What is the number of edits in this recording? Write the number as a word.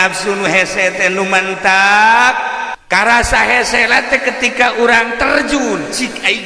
one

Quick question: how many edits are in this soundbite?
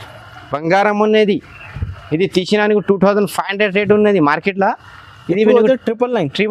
zero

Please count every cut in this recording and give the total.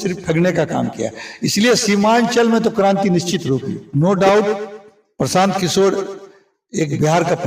one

